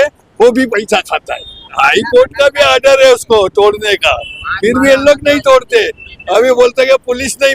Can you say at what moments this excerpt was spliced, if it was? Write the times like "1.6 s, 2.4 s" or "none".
1.7 s